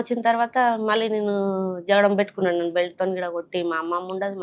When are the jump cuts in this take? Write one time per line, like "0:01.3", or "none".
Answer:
none